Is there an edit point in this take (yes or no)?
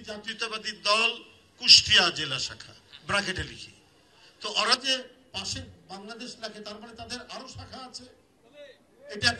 no